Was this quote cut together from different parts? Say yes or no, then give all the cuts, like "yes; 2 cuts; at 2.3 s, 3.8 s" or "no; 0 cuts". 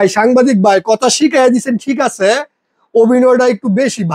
no; 0 cuts